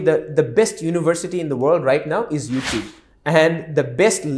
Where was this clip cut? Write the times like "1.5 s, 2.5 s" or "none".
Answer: none